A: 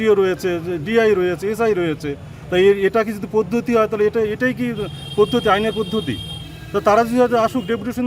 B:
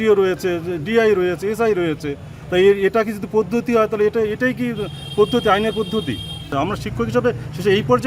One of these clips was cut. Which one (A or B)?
B